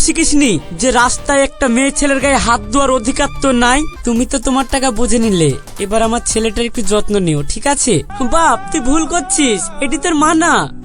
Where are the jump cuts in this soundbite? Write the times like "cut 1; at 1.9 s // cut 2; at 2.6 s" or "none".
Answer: cut 1; at 3.9 s // cut 2; at 8.1 s